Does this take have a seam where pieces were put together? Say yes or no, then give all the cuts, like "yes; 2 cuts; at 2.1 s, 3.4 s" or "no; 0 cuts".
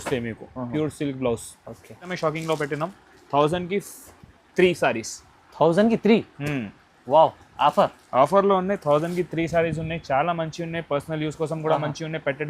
yes; 1 cut; at 2.1 s